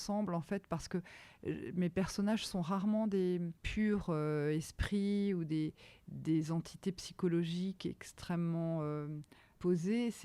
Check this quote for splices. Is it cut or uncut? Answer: cut